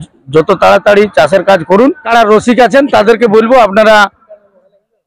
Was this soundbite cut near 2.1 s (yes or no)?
yes